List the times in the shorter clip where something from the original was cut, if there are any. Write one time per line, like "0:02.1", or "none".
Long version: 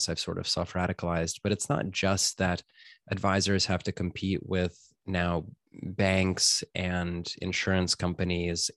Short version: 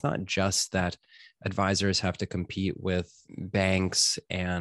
0:03.2